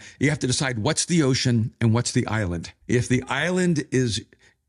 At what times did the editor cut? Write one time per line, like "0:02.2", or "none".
0:02.7